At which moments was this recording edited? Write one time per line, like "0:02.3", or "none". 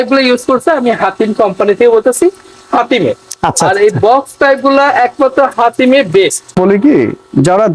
0:06.6